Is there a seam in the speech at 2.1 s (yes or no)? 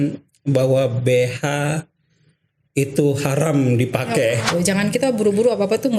no